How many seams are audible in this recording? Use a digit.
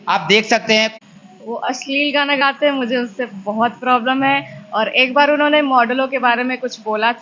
1